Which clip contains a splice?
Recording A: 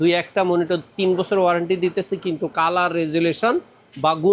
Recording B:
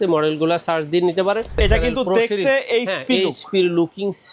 B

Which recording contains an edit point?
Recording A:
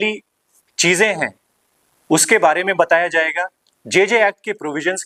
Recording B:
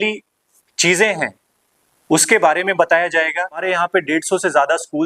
B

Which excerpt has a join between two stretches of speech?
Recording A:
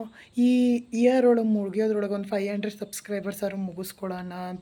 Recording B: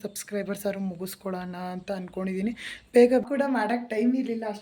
B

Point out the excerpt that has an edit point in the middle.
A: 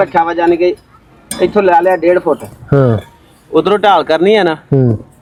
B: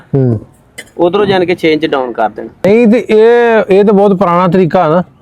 B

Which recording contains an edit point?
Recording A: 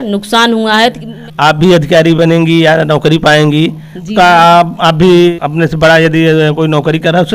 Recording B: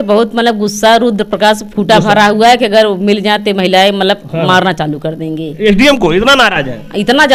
A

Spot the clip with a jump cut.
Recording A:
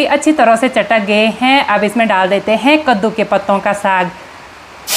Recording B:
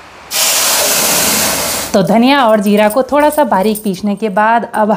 B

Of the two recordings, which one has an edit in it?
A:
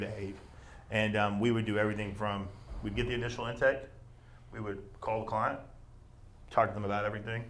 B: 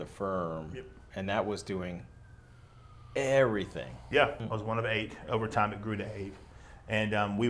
B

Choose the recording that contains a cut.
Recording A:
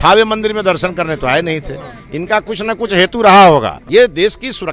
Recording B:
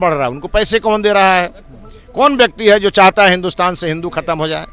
A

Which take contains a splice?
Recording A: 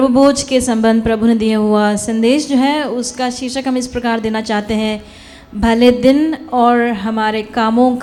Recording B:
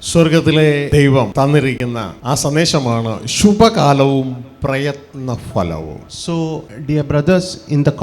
B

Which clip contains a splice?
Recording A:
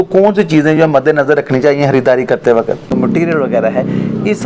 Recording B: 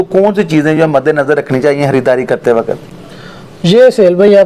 A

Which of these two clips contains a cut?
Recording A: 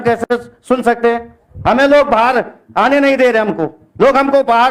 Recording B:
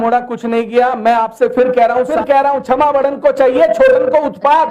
B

